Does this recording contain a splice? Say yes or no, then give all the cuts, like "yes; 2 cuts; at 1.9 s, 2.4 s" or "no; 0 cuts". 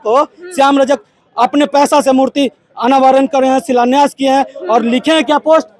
no; 0 cuts